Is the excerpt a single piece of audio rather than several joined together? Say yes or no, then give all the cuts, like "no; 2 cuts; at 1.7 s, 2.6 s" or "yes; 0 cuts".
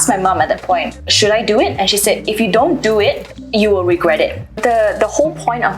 no; 3 cuts; at 0.9 s, 3.3 s, 4.5 s